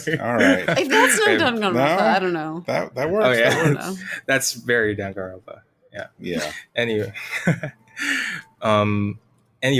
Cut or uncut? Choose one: uncut